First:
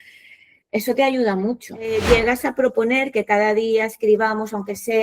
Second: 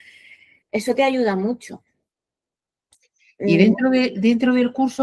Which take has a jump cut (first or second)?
first